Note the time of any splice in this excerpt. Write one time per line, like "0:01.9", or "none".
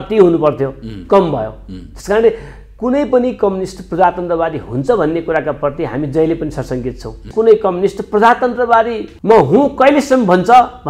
0:07.2
0:09.1